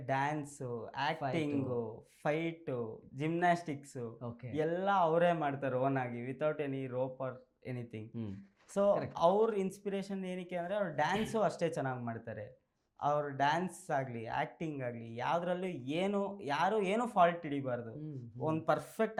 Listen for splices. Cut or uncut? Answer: uncut